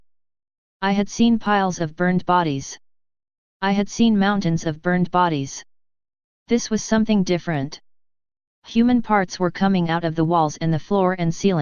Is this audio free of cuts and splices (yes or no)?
yes